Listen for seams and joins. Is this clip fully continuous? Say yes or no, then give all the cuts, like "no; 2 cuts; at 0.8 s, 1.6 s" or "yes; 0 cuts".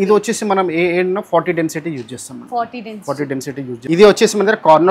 no; 1 cut; at 3.8 s